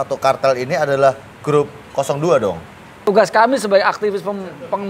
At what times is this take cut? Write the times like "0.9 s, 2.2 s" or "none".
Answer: 3.0 s